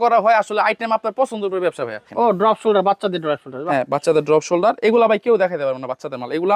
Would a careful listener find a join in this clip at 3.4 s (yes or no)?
no